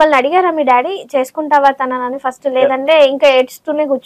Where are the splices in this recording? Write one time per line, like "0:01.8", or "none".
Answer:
none